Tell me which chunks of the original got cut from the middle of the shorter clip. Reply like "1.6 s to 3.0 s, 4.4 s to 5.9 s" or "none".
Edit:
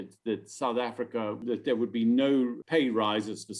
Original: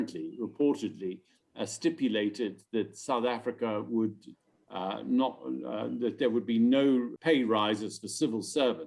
3.9 s to 5.9 s

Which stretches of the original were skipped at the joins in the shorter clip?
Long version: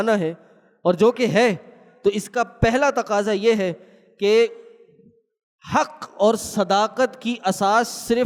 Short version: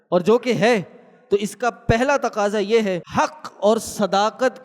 3.8 s to 5.6 s

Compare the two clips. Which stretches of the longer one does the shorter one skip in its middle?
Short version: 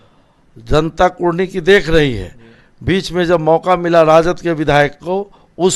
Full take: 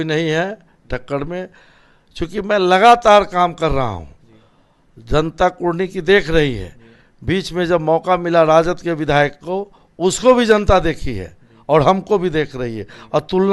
none

